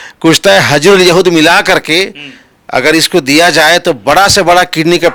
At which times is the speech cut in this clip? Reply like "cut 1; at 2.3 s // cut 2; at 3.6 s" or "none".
none

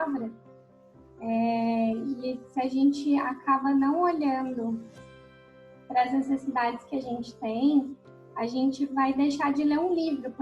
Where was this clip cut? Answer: none

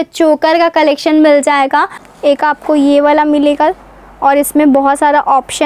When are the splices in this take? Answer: cut 1; at 2.0 s

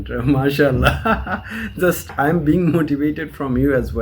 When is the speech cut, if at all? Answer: cut 1; at 2.1 s

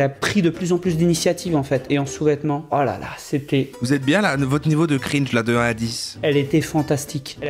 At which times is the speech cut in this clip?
cut 1; at 1.9 s // cut 2; at 6.1 s

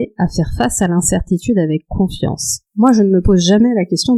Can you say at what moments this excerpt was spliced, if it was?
cut 1; at 2.6 s

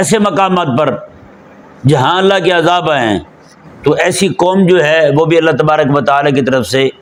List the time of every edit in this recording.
none

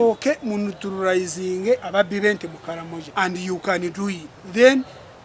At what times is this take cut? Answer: cut 1; at 1.9 s // cut 2; at 3.0 s // cut 3; at 4.3 s

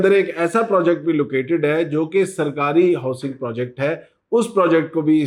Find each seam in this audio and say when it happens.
none

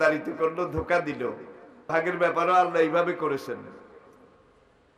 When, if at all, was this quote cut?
cut 1; at 1.9 s

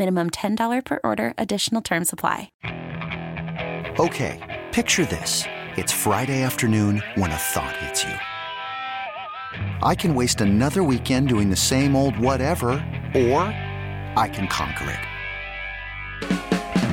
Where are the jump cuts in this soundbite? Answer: cut 1; at 2.5 s

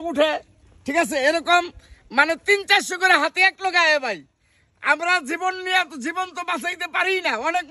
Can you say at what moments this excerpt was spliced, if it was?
none

